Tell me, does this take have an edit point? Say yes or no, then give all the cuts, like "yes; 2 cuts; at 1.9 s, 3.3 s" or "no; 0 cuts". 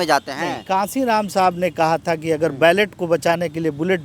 no; 0 cuts